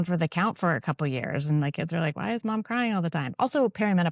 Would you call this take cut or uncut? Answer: uncut